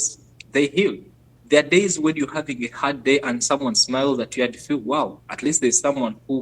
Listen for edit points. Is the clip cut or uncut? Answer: cut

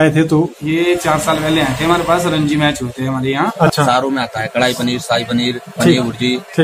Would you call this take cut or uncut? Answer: cut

